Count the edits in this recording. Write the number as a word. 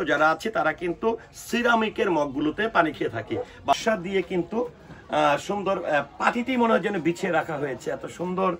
one